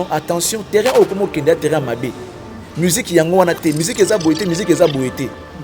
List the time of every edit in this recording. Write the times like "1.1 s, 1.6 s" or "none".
none